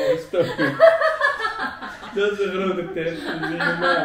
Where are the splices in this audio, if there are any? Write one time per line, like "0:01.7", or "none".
none